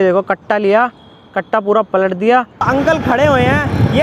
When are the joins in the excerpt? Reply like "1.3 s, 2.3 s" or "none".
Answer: 2.7 s